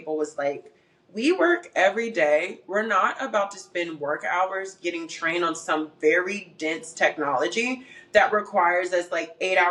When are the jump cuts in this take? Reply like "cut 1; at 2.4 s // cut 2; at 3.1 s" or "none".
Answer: none